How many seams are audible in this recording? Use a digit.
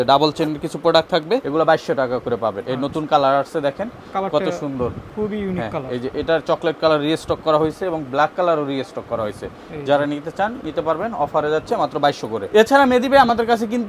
0